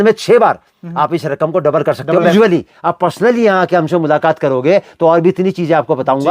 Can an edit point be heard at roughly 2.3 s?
yes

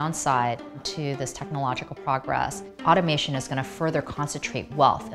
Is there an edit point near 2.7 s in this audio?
yes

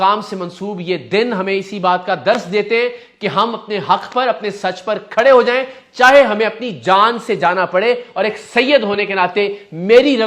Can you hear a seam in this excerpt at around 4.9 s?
no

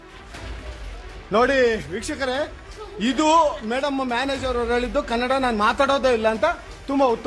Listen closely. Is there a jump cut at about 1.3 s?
yes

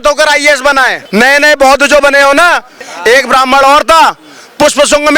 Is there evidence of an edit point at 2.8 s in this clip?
yes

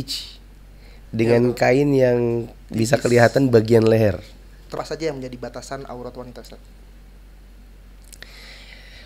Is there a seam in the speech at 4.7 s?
yes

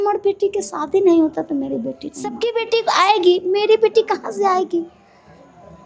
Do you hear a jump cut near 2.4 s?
yes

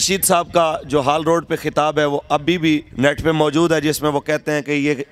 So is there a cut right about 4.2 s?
no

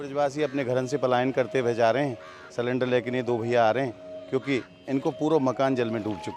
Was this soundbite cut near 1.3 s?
no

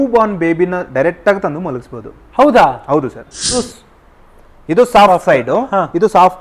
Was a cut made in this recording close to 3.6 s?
yes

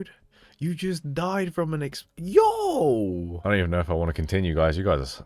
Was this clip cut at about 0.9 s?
no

